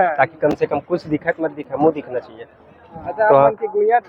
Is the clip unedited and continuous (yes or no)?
yes